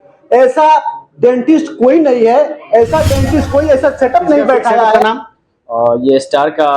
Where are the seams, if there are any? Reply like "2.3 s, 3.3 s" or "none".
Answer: 5.0 s